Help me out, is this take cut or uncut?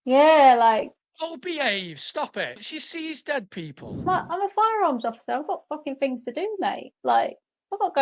cut